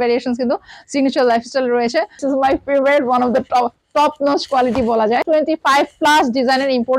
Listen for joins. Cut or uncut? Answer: cut